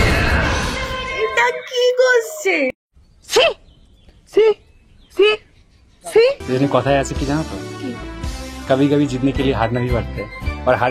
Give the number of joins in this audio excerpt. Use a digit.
1